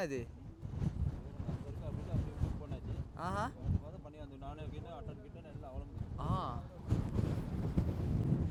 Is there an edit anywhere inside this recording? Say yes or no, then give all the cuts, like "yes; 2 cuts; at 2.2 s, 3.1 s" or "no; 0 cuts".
no; 0 cuts